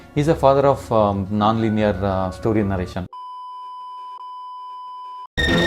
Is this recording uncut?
yes; 0 cuts

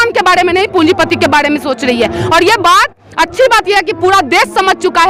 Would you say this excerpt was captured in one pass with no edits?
yes; 0 cuts

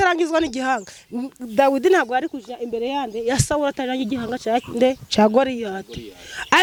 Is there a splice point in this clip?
no; 0 cuts

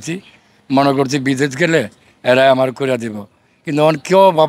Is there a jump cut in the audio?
no; 0 cuts

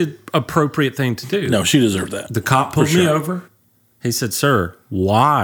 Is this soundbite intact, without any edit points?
yes; 0 cuts

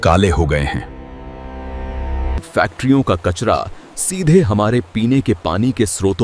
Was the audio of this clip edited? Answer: yes; 1 cut; at 2.4 s

